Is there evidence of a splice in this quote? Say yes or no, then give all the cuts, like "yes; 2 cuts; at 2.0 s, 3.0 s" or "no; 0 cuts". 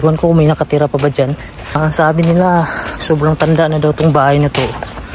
yes; 1 cut; at 1.8 s